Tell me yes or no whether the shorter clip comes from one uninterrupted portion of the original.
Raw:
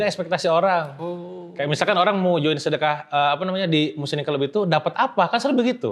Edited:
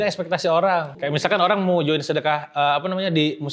no